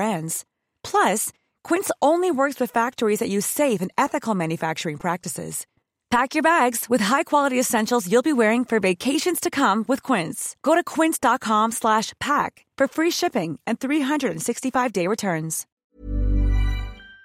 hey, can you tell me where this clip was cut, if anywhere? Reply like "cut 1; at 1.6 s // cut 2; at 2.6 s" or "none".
cut 1; at 15.6 s